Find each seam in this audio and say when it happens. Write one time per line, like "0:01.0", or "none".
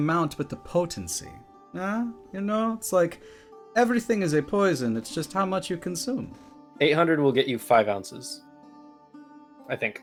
none